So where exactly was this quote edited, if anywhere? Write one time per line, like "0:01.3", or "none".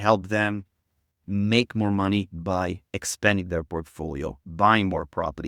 none